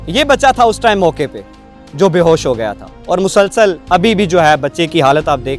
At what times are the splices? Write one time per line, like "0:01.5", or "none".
0:03.8